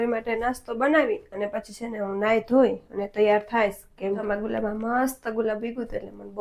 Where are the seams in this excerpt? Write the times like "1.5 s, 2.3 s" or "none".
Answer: 4.2 s